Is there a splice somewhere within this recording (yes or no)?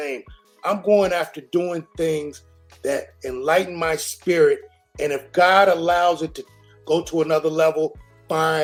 no